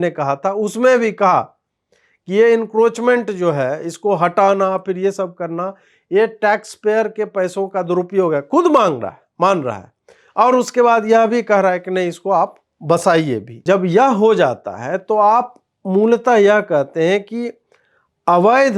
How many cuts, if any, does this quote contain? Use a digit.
1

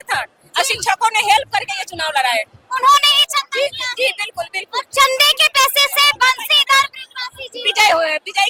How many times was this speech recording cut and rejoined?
0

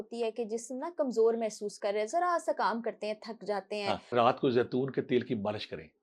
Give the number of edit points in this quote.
1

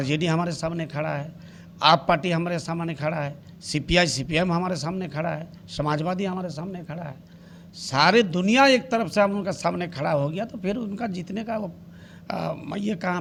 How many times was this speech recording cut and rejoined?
0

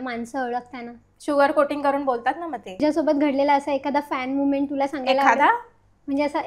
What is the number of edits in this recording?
1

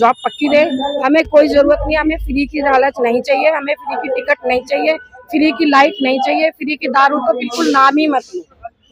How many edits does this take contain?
0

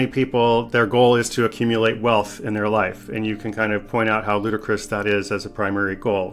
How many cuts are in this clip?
0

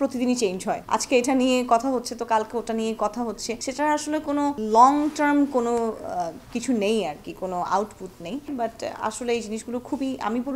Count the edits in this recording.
1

